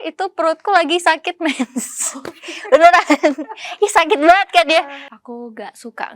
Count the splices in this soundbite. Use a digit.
1